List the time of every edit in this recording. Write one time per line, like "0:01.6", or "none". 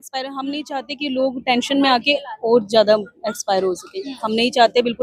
none